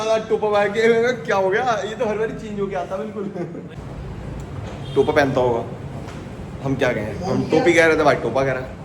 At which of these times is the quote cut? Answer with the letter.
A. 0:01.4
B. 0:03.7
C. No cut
B